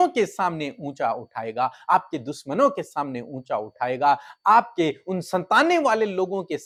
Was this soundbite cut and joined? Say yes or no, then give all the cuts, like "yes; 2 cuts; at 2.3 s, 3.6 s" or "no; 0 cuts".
no; 0 cuts